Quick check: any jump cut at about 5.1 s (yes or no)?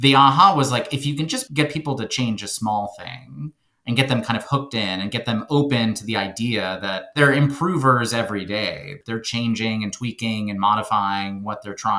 no